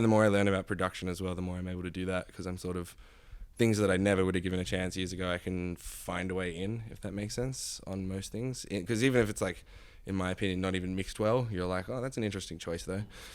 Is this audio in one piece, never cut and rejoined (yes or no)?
yes